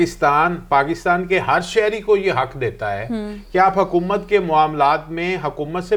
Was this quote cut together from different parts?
no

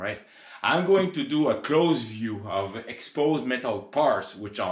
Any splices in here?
no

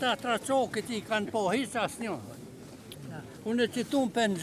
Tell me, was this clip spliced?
no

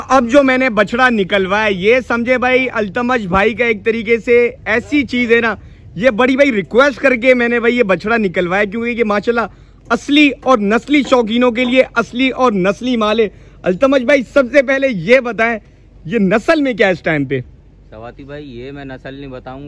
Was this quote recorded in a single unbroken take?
yes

